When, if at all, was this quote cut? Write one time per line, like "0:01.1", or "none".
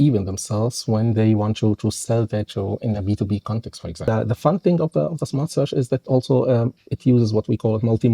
0:04.0